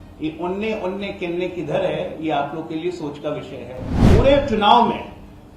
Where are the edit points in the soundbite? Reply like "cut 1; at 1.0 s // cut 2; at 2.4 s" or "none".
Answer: cut 1; at 3.9 s